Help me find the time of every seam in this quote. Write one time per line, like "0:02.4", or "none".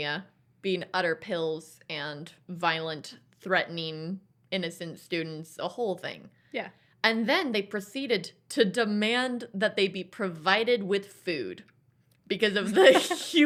none